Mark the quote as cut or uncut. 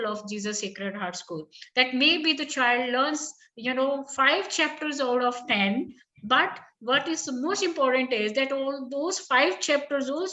uncut